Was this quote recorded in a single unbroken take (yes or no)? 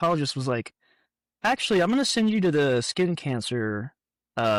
yes